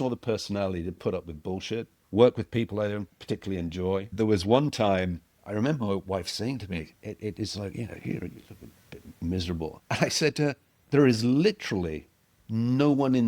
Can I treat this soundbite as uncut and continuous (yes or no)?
no